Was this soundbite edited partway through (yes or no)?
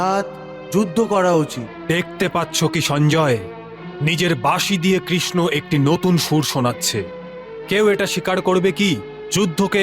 yes